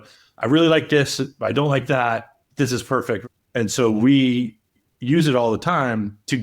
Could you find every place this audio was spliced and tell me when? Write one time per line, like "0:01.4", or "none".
0:03.2